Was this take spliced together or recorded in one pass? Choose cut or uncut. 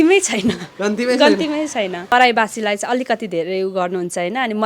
cut